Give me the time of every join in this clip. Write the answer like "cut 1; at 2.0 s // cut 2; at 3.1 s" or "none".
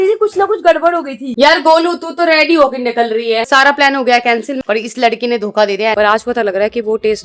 cut 1; at 1.3 s // cut 2; at 3.5 s // cut 3; at 4.6 s // cut 4; at 5.9 s